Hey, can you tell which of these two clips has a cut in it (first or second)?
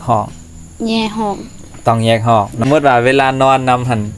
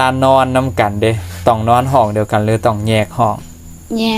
first